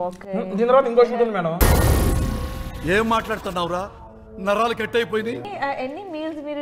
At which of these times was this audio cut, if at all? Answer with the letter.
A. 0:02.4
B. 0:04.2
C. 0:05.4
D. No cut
C